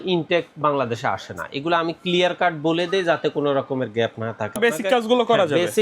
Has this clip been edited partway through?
yes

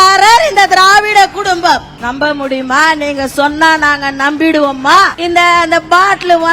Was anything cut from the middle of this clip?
yes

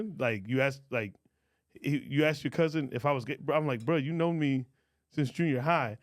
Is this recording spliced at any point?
no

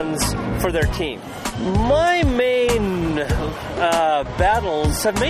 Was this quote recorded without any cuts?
no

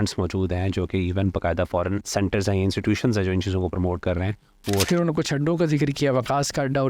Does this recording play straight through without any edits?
no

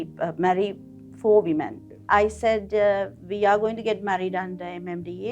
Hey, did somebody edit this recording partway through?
yes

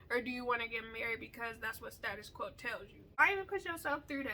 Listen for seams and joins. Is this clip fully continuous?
no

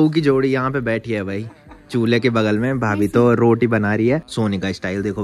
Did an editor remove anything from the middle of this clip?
yes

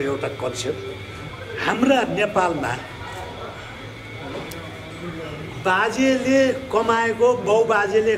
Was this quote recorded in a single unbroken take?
no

